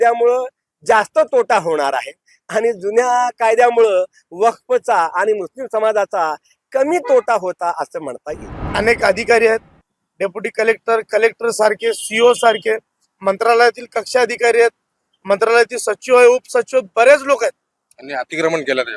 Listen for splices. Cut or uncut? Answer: cut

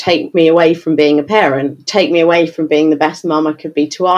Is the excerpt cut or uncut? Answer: uncut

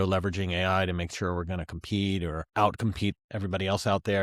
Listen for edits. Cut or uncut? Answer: cut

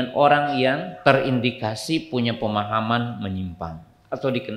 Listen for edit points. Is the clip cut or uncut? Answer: cut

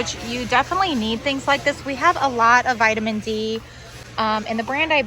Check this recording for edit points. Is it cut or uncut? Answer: uncut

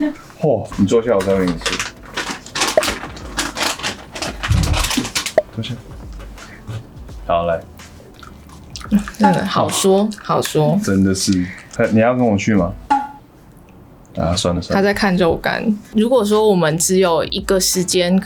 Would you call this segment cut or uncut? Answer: uncut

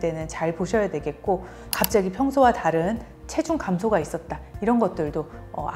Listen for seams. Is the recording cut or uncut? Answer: cut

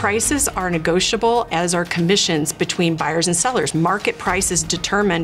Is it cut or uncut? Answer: uncut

